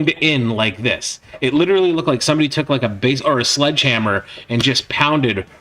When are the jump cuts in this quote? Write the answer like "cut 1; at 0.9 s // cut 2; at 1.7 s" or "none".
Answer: none